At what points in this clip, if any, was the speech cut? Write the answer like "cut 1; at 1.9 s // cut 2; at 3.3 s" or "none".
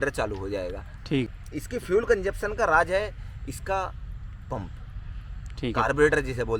cut 1; at 1.3 s